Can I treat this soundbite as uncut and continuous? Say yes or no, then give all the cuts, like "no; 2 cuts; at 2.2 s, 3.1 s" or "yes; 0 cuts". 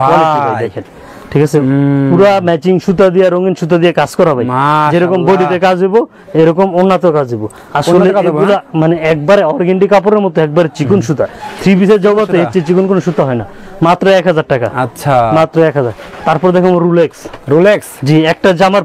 yes; 0 cuts